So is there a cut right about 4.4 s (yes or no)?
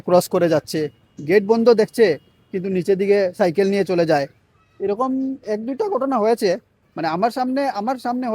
no